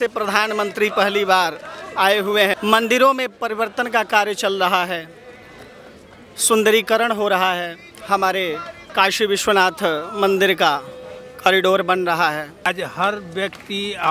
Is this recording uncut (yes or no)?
no